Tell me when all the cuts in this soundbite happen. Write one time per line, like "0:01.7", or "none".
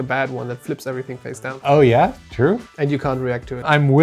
0:02.6